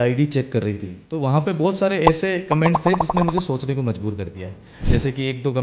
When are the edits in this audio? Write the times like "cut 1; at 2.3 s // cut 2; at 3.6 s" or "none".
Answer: none